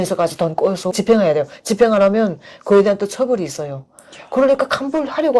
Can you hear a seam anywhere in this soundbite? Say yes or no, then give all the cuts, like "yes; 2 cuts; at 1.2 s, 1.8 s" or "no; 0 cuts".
yes; 1 cut; at 0.9 s